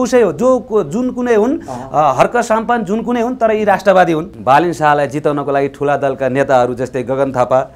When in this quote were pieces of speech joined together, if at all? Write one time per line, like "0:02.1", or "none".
0:04.3